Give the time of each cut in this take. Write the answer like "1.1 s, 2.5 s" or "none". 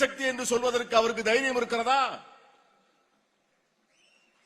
none